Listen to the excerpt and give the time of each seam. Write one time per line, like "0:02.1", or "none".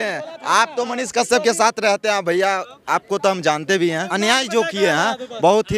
0:04.1